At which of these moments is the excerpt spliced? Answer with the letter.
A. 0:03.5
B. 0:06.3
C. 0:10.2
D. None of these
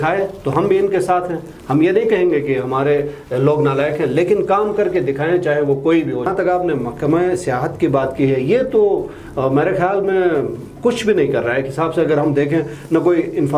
B